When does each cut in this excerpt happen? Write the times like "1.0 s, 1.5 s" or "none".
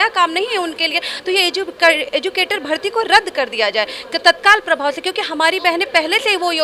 none